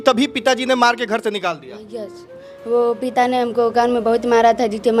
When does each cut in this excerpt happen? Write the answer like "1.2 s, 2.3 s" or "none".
2.3 s